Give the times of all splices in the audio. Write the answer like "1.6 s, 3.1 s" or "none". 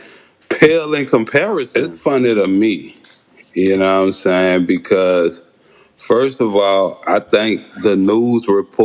1.7 s